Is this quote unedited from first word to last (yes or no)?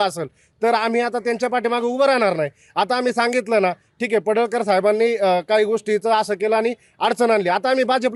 yes